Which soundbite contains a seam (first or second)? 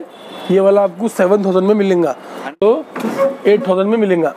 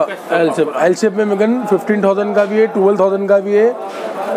first